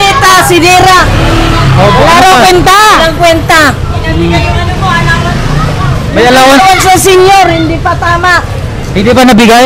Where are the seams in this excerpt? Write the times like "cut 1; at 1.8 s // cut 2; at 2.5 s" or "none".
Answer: none